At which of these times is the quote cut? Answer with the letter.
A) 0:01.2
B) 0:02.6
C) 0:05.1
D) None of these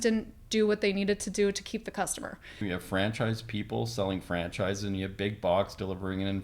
B